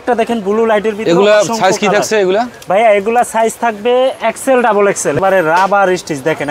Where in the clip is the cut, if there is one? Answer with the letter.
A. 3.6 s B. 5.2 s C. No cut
B